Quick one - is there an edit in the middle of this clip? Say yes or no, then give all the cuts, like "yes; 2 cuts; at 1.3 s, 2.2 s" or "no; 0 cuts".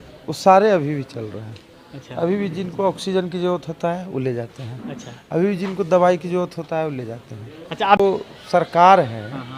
yes; 1 cut; at 8.0 s